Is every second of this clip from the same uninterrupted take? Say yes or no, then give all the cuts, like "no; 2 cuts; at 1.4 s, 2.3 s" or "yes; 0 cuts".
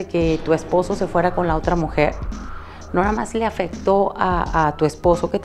yes; 0 cuts